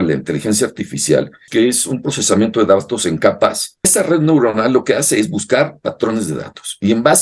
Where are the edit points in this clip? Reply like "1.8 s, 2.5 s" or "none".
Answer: 1.4 s, 3.9 s

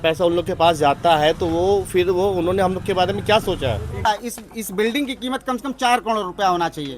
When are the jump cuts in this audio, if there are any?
4.1 s

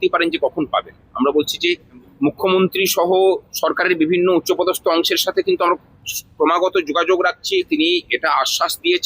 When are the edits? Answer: 2.1 s, 7.7 s

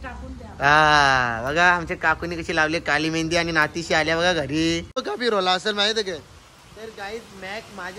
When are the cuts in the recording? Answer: 5.1 s

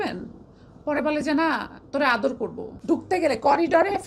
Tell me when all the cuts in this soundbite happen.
2.7 s

